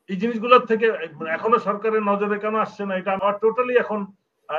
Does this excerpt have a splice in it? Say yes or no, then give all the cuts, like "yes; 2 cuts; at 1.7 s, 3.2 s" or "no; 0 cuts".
yes; 1 cut; at 3.2 s